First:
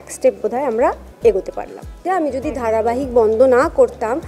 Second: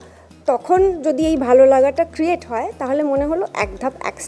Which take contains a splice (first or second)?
first